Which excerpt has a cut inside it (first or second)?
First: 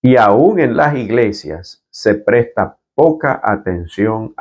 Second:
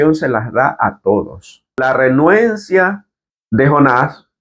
second